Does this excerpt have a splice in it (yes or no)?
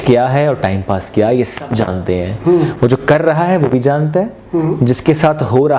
no